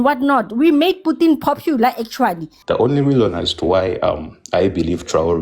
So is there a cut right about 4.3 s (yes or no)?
no